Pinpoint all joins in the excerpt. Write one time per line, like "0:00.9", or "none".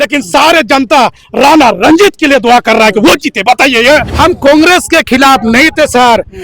0:04.1